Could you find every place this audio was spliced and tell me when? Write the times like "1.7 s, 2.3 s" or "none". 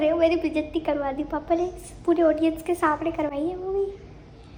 none